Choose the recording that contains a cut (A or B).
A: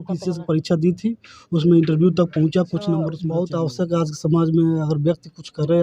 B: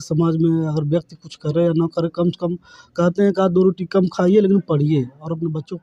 A